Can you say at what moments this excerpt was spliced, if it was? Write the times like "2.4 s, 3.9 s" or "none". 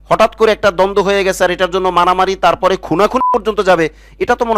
none